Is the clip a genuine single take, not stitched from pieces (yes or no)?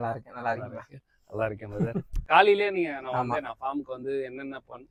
yes